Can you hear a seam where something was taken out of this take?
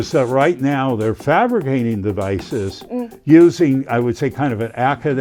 no; 0 cuts

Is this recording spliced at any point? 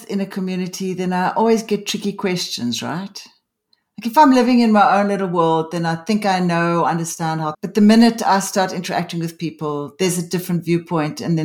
yes; 1 cut; at 7.6 s

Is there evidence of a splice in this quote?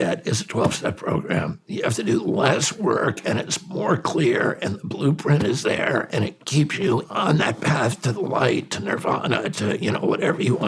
yes; 2 cuts; at 1.6 s, 7.1 s

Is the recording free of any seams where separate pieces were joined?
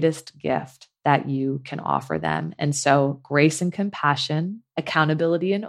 no; 1 cut; at 4.6 s

